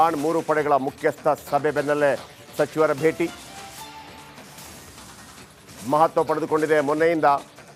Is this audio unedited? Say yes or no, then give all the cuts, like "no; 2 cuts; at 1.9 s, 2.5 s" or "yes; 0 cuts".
yes; 0 cuts